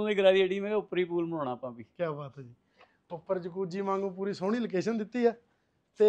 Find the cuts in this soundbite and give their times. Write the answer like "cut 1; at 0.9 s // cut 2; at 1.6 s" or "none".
none